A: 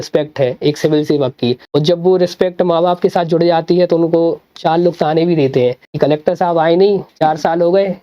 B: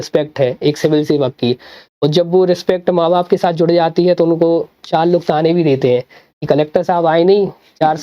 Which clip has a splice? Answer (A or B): A